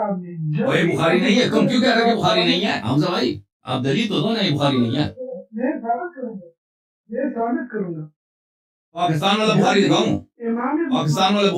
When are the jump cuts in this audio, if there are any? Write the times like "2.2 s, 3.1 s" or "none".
none